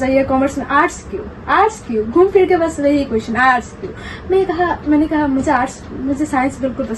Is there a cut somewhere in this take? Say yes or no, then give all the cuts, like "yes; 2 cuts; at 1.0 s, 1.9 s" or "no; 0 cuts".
no; 0 cuts